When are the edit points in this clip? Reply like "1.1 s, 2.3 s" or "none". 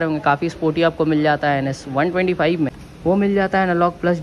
2.8 s

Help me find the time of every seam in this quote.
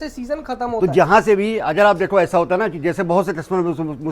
none

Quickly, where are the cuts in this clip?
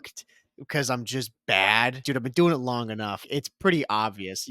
2.0 s, 3.2 s

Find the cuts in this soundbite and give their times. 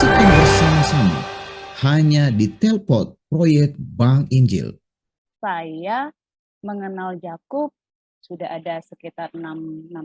5.0 s, 7.9 s

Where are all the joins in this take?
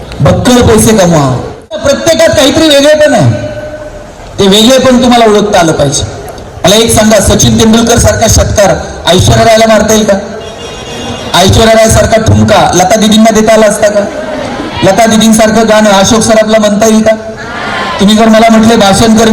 1.8 s

